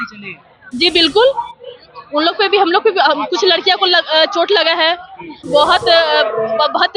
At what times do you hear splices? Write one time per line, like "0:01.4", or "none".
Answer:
0:05.4